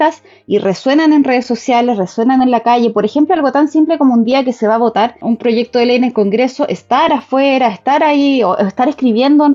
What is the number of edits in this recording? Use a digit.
0